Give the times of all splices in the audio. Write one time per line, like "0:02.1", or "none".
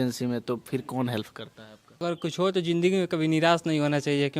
0:02.0